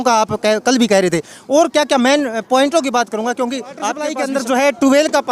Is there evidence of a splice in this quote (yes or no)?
yes